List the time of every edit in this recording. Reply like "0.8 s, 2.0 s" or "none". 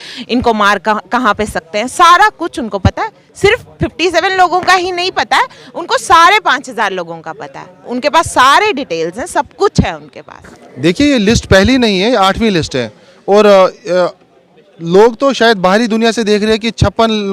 10.6 s